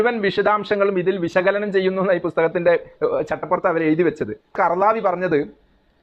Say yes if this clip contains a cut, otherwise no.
yes